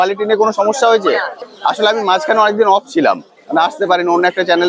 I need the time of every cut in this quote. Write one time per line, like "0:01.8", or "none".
0:01.4